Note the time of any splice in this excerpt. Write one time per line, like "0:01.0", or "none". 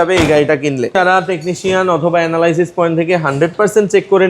0:00.9